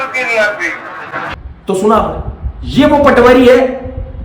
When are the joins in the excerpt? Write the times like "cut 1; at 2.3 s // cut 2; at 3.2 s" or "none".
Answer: cut 1; at 1.2 s